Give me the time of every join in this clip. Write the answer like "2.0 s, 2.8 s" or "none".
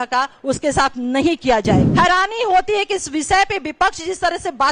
1.9 s